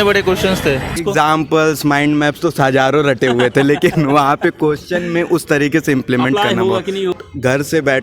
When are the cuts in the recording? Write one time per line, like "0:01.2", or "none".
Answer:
0:01.0
0:07.1